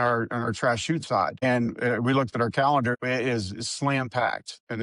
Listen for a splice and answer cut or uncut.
cut